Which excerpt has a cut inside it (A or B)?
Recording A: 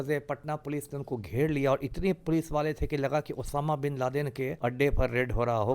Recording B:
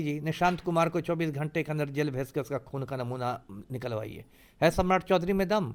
A